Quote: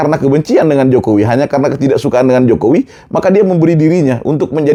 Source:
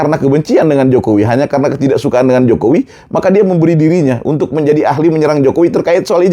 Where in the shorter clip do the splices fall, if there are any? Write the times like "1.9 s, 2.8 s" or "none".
none